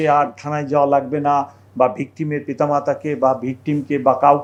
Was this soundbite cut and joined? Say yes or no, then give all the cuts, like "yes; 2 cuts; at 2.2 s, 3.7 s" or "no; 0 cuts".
no; 0 cuts